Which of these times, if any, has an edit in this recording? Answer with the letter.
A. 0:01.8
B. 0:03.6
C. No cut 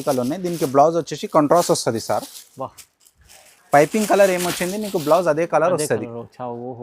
C